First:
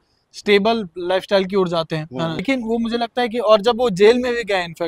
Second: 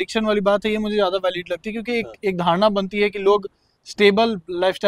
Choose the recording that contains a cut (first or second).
first